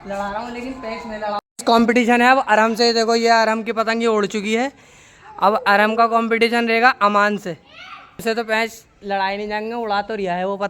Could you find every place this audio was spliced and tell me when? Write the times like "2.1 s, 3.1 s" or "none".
1.4 s, 8.2 s